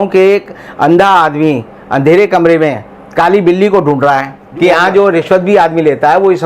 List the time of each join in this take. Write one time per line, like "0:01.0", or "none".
0:04.4